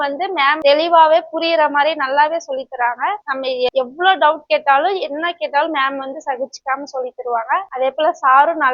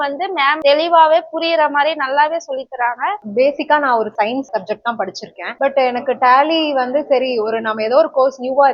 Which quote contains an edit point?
second; 1 cut; at 3.2 s

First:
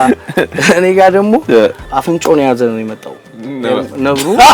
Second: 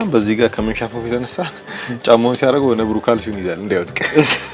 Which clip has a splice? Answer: first; 1 cut; at 1.9 s

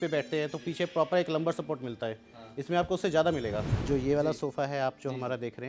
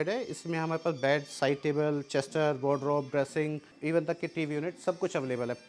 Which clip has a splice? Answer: first; 1 cut; at 3.7 s

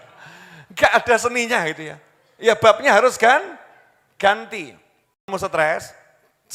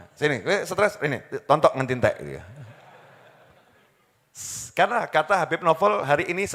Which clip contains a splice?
first; 1 cut; at 5.3 s

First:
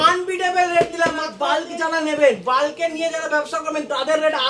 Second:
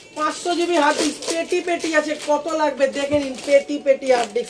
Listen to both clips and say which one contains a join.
first; 1 cut; at 1.3 s

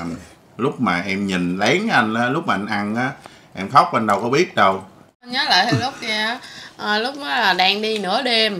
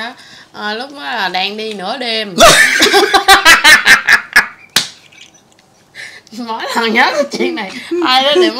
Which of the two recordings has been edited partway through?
first; 1 cut; at 5.3 s

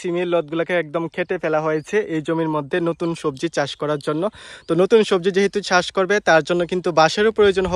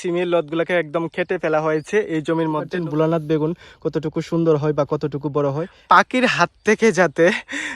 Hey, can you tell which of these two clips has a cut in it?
second; 2 cuts; at 2.7 s, 5.7 s

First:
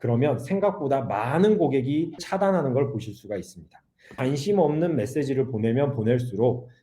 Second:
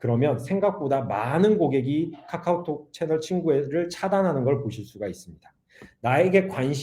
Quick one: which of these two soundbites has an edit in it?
first; 2 cuts; at 2.2 s, 4.1 s

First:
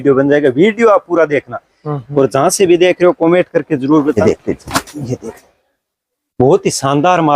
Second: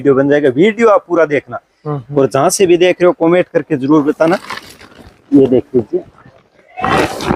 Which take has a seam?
first; 1 cut; at 4.2 s

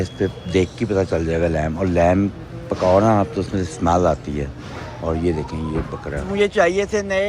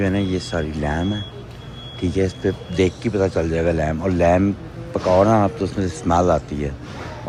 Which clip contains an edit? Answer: first; 1 cut; at 6.2 s

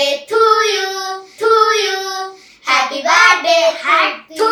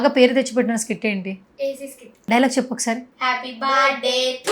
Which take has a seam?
second; 1 cut; at 2.1 s

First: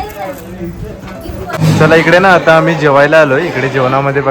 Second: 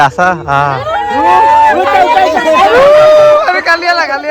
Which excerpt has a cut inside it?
first; 1 cut; at 1.6 s

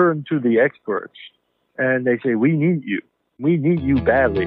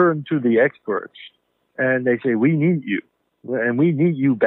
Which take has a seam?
first; 1 cut; at 3.4 s

